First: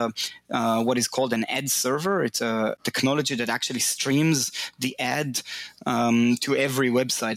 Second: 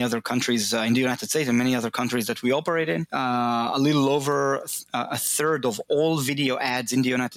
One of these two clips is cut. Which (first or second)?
second